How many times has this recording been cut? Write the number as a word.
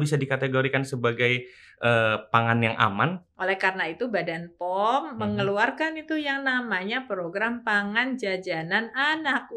one